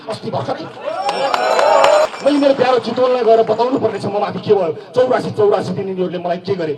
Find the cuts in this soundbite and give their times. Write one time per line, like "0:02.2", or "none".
0:02.1